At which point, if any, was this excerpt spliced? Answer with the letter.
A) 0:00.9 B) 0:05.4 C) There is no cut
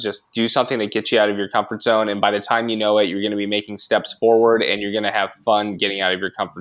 C